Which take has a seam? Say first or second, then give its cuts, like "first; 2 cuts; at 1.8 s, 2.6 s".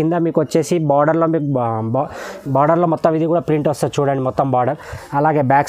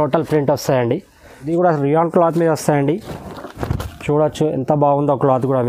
second; 1 cut; at 1.3 s